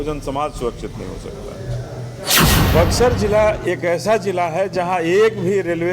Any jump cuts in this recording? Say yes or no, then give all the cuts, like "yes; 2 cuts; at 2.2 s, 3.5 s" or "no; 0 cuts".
yes; 1 cut; at 2.4 s